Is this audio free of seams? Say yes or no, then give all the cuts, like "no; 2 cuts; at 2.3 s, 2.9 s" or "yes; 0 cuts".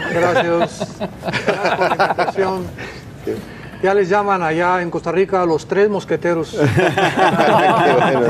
no; 1 cut; at 1.4 s